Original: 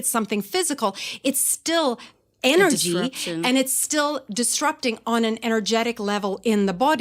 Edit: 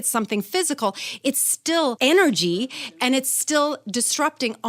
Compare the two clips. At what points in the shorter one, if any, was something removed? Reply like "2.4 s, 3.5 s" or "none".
2.0 s